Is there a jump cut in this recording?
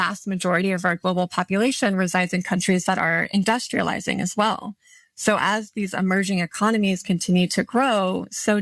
no; 0 cuts

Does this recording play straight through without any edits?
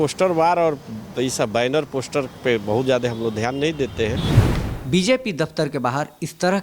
no; 1 cut; at 4.3 s

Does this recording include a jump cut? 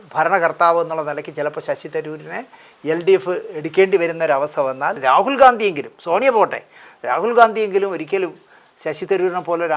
yes; 1 cut; at 5.0 s

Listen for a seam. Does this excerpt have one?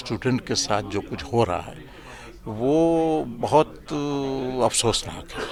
no; 0 cuts

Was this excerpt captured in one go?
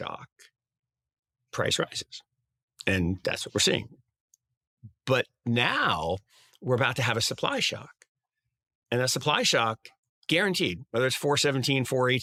yes; 0 cuts

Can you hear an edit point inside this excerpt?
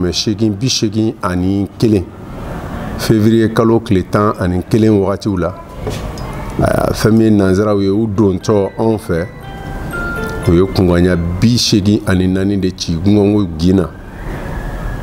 no; 0 cuts

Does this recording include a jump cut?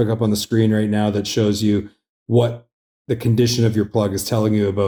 no; 0 cuts

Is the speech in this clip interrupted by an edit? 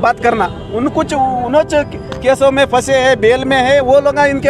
no; 0 cuts

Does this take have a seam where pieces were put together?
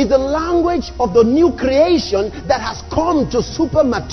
no; 0 cuts

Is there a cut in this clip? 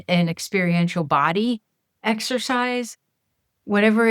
no; 0 cuts

